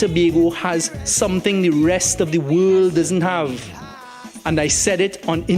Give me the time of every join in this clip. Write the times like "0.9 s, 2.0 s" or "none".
none